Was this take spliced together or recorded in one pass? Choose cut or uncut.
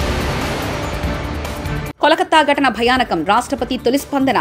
cut